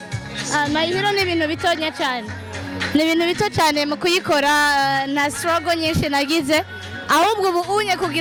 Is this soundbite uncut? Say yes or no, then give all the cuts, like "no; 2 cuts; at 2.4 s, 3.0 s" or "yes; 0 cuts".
yes; 0 cuts